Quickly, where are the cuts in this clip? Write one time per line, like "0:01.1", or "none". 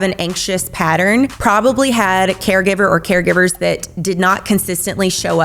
0:01.4